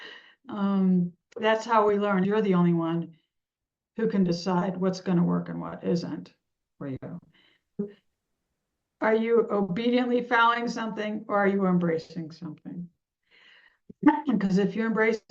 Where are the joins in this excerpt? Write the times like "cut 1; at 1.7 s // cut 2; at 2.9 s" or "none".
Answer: cut 1; at 2.3 s // cut 2; at 7.8 s